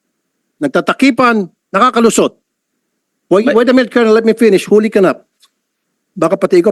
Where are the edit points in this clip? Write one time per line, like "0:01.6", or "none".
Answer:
0:03.1